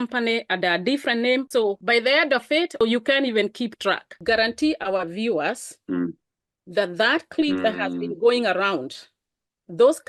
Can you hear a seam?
yes; 3 cuts; at 1.5 s, 2.8 s, 4.2 s

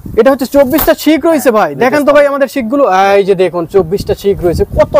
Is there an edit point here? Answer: no; 0 cuts

